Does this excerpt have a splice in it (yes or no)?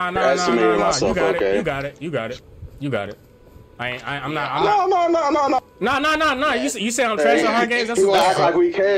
no